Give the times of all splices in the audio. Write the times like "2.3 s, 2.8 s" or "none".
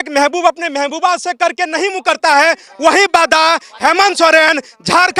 none